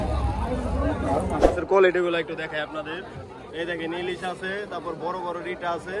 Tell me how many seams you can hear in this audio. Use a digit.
1